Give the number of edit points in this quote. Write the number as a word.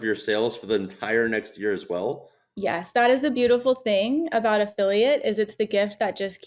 zero